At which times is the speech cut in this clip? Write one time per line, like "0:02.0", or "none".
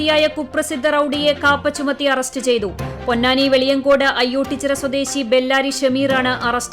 none